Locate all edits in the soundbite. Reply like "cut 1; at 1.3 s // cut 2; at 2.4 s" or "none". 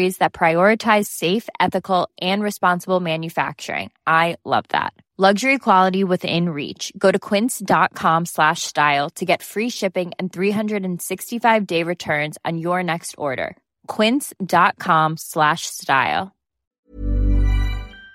cut 1; at 16.6 s